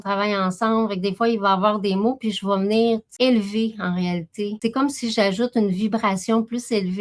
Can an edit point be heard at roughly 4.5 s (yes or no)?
yes